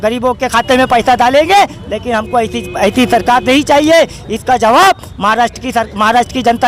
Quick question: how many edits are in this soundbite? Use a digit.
0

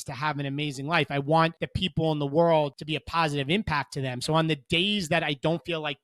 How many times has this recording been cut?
2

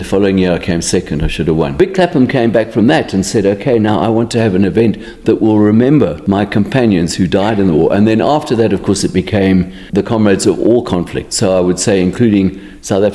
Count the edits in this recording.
3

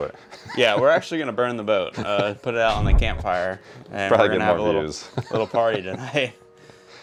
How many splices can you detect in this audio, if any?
0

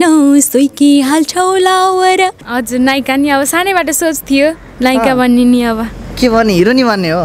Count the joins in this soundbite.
1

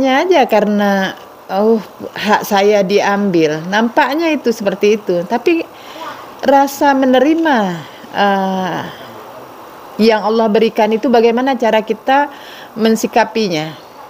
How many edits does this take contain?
0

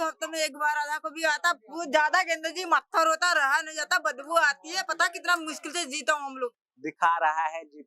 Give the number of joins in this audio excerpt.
1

